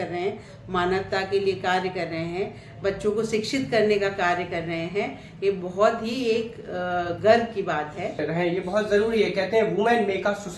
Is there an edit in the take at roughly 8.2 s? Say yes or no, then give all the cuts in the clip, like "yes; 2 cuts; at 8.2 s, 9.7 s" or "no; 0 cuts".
yes; 1 cut; at 8.2 s